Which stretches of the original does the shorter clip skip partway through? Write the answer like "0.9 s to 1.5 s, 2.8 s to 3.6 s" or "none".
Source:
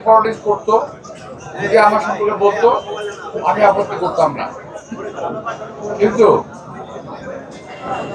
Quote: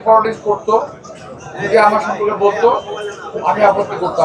none